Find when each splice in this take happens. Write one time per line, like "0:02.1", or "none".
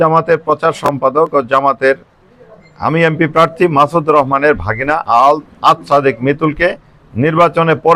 none